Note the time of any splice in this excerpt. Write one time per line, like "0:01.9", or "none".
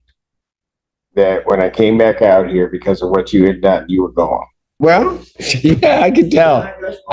0:04.6